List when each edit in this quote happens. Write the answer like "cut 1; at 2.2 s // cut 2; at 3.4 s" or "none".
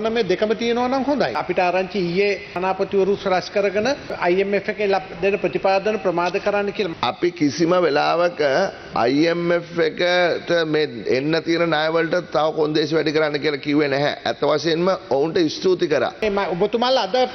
cut 1; at 1.4 s // cut 2; at 2.6 s // cut 3; at 4.1 s // cut 4; at 6.9 s // cut 5; at 16.2 s

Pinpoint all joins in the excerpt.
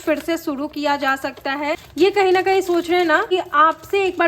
cut 1; at 1.9 s // cut 2; at 3.3 s

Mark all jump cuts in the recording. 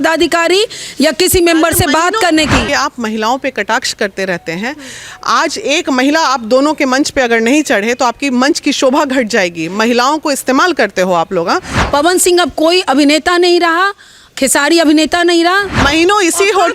cut 1; at 2.7 s // cut 2; at 11.8 s // cut 3; at 15.7 s

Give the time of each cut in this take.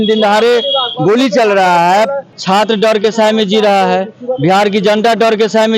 cut 1; at 2.3 s

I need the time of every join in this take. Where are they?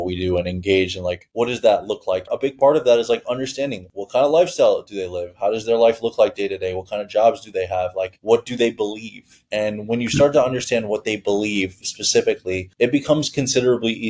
cut 1; at 2.3 s

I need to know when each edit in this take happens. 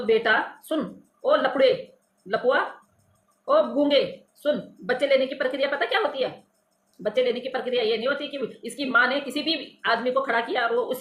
none

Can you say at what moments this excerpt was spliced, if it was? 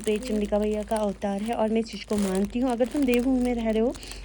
none

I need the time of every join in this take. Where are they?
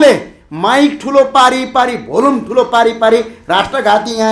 none

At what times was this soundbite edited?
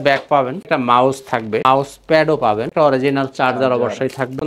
none

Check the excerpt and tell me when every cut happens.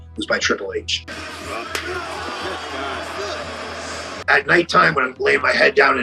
none

